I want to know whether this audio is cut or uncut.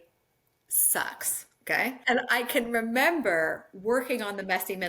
cut